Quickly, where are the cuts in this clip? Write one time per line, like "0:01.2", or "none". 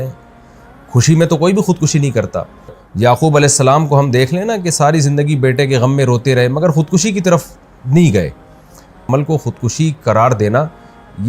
0:02.8
0:09.0

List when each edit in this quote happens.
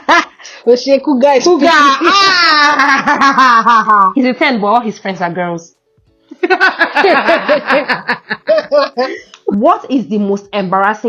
0:04.1
0:09.5

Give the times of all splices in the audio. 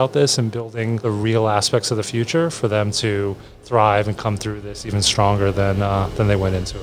0:01.0

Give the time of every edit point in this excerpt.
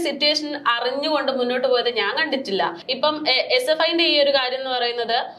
0:02.8

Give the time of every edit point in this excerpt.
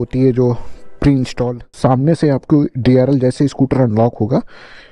0:01.6

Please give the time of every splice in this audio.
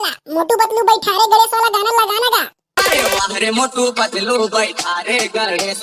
0:02.6

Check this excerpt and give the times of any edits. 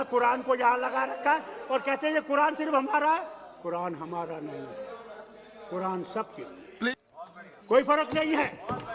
0:06.9

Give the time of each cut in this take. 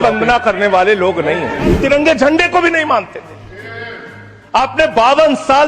0:01.8

